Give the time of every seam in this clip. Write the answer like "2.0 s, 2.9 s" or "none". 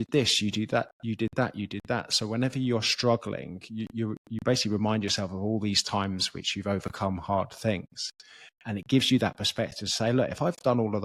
none